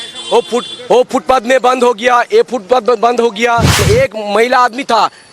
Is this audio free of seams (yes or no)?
no